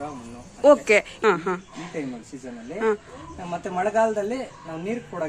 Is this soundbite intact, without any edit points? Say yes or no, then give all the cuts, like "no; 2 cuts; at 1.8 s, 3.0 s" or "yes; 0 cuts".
no; 1 cut; at 1.1 s